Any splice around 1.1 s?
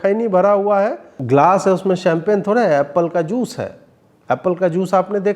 yes; 1 cut; at 1.1 s

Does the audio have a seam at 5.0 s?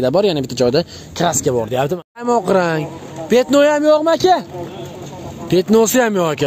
no; 1 cut; at 2.2 s

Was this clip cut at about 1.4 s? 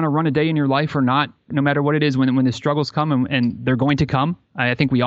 no; 0 cuts

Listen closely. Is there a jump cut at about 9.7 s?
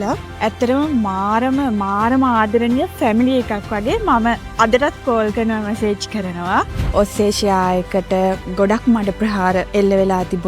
yes; 3 cuts; at 6.8 s, 8.4 s, 9.7 s

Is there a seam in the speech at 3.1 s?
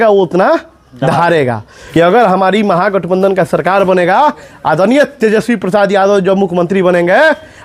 no; 1 cut; at 1.8 s

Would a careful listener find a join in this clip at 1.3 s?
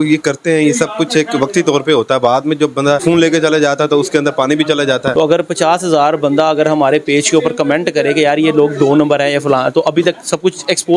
no; 2 cuts; at 3.0 s, 5.1 s

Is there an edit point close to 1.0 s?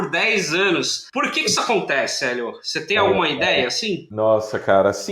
yes; 2 cuts; at 1.0 s, 4.1 s

